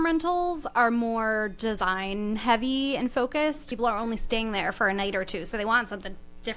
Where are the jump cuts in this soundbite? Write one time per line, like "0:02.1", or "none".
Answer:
0:03.7